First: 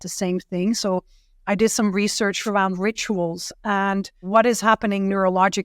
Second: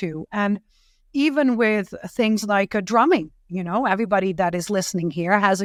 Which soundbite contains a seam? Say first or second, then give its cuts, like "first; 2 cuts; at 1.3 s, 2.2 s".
first; 2 cuts; at 2.4 s, 4.2 s